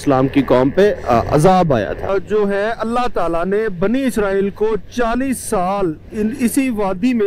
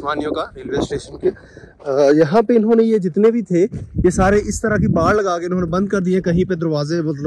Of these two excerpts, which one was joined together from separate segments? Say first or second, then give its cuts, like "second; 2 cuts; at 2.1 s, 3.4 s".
first; 1 cut; at 2.0 s